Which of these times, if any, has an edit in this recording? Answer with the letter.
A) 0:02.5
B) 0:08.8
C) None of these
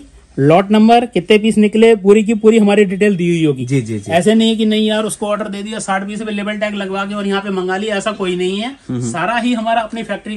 C